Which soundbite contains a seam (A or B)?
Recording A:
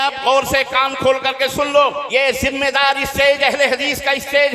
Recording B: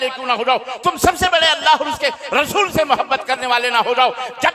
A